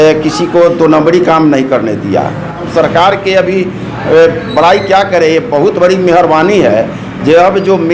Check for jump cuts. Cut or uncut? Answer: cut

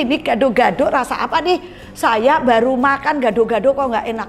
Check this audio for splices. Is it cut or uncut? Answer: uncut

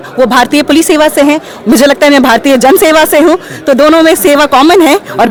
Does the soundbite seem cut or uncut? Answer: uncut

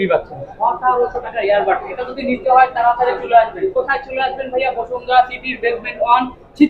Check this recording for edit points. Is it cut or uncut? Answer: uncut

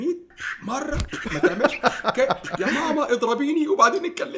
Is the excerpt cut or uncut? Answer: uncut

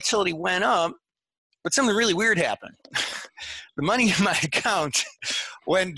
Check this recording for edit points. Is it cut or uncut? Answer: uncut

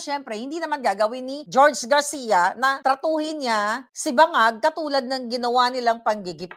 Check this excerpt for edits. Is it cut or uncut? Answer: uncut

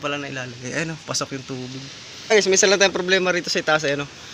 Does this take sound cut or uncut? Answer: cut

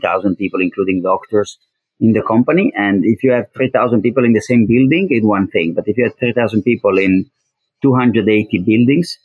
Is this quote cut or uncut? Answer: uncut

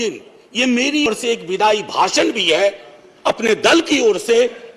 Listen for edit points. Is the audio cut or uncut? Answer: cut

